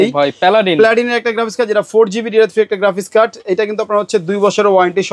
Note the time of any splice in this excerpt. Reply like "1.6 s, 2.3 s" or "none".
none